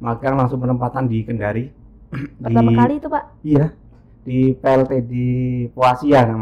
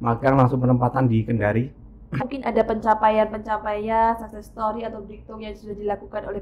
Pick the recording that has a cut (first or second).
second